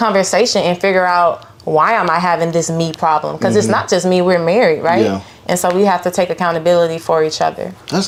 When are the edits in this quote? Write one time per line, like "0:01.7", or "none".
none

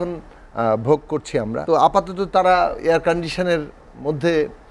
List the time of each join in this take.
0:01.6

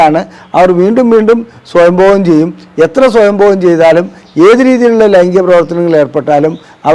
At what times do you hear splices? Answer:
none

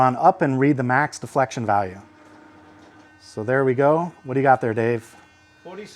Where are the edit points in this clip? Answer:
none

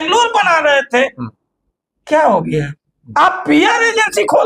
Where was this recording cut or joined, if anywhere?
0:03.0

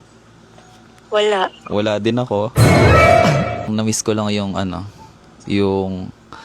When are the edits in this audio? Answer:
0:03.6

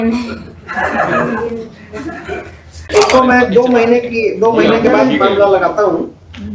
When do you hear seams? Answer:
0:02.9

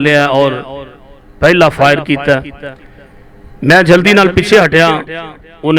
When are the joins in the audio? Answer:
none

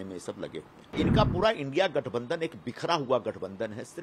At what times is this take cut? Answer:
0:00.9

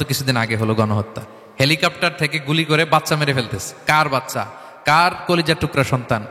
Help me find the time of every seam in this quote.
none

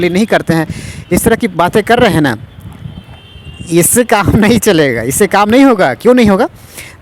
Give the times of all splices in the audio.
none

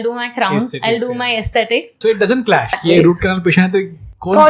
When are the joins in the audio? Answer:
0:02.0
0:02.8

